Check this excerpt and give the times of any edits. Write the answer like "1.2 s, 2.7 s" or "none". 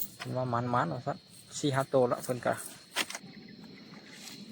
3.2 s